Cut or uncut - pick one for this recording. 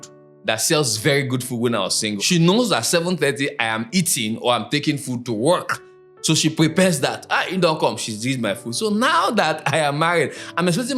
cut